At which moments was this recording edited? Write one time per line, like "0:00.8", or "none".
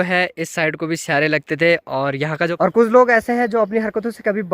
0:02.5